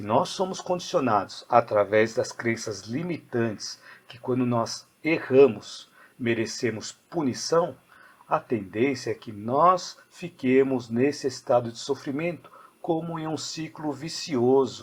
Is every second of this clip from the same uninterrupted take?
yes; 0 cuts

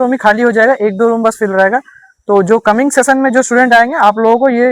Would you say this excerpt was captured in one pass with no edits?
yes; 0 cuts

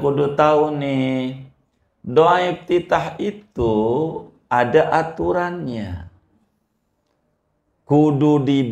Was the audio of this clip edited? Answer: no; 0 cuts

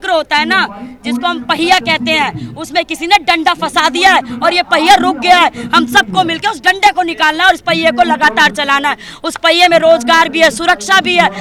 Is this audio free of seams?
yes; 0 cuts

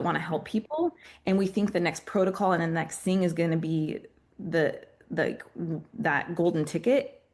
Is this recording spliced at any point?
no; 0 cuts

